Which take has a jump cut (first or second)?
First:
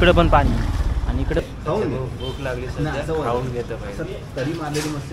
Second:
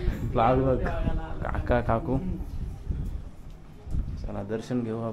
first